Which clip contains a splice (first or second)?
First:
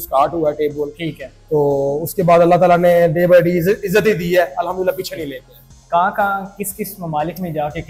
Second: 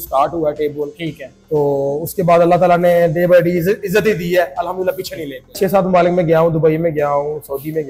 second